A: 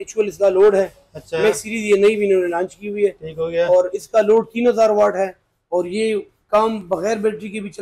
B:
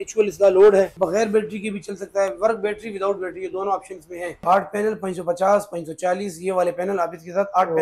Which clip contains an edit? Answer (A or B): B